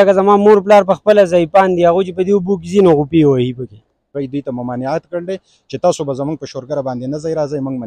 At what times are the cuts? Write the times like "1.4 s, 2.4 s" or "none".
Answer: 4.2 s